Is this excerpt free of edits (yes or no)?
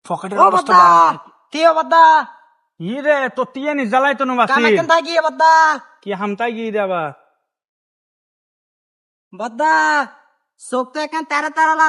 yes